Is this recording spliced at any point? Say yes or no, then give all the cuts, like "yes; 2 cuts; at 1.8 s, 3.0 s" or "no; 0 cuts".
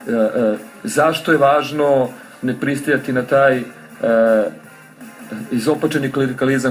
no; 0 cuts